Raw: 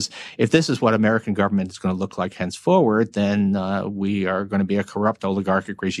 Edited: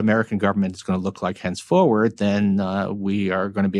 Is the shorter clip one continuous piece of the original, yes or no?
yes